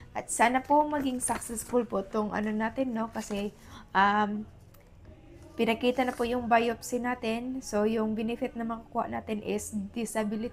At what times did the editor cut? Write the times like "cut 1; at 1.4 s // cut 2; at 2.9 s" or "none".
none